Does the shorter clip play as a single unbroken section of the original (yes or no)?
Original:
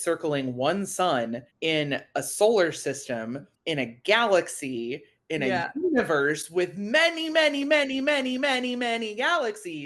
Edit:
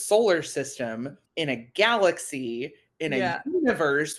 yes